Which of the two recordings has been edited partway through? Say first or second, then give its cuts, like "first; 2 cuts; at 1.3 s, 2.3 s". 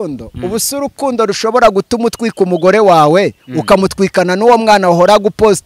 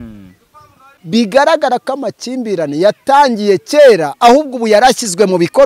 second; 1 cut; at 0.9 s